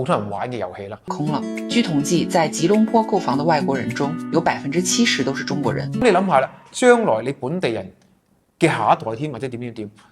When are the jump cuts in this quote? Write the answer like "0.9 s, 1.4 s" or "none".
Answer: 1.1 s, 6.0 s

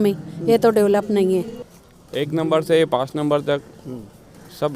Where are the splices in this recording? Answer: 1.5 s

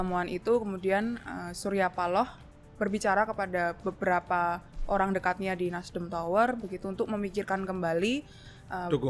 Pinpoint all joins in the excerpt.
none

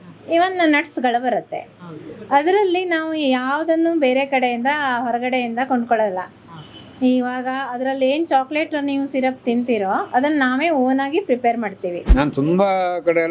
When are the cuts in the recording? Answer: 11.9 s

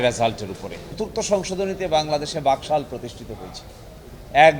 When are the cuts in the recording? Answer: 1.0 s

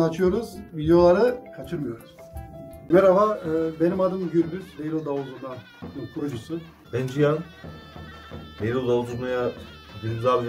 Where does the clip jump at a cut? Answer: 2.9 s, 6.8 s

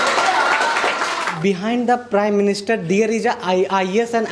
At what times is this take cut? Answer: 1.4 s

